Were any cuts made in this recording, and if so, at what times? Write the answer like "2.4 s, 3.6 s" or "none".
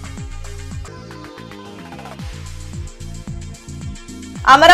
0.8 s, 3.8 s